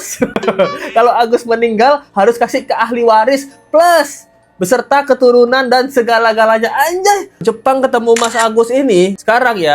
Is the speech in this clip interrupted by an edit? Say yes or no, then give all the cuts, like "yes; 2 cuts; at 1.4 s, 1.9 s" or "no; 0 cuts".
yes; 1 cut; at 7.4 s